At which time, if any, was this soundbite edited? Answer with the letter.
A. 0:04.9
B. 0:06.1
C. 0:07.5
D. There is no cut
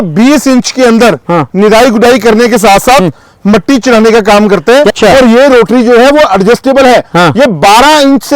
A